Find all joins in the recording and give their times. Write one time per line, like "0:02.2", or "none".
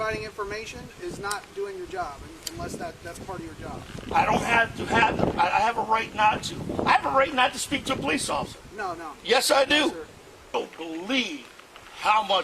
0:10.5